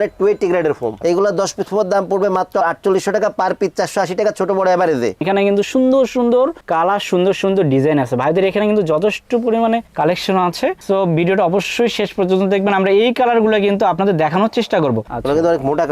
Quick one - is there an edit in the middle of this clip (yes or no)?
yes